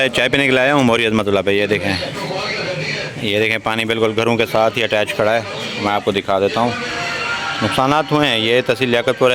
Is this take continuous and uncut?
yes; 0 cuts

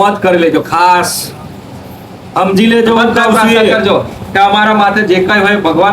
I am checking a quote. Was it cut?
yes; 1 cut; at 3.8 s

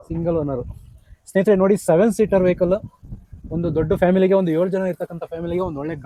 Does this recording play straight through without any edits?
yes; 0 cuts

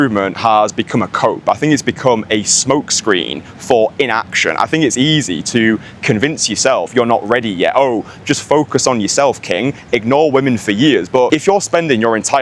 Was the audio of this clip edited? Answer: yes; 1 cut; at 11.3 s

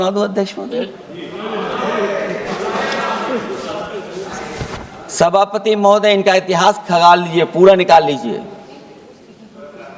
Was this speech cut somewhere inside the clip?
no; 0 cuts

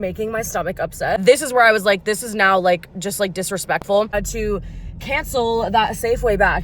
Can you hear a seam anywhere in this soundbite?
yes; 2 cuts; at 1.2 s, 4.1 s

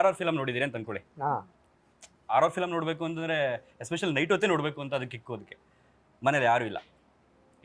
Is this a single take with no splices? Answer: yes; 0 cuts

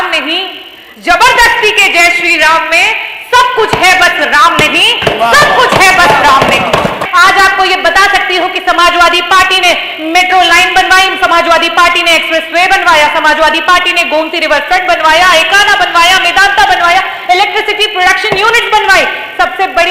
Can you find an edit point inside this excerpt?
yes; 1 cut; at 7.0 s

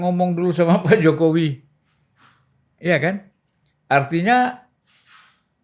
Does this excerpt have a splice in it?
no; 0 cuts

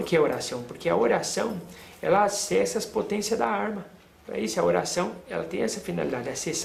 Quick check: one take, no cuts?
yes; 0 cuts

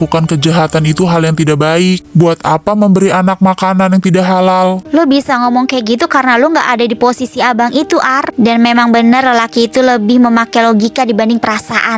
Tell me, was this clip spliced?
no; 0 cuts

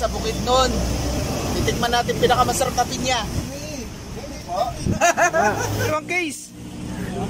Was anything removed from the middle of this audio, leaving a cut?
yes; 3 cuts; at 3.4 s, 5.0 s, 5.9 s

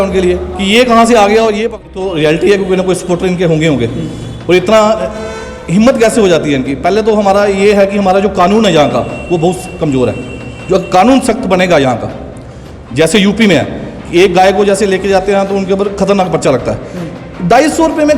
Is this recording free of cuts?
no; 1 cut; at 1.9 s

